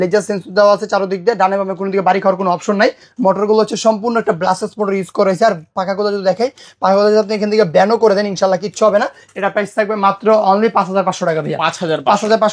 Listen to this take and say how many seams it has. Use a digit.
0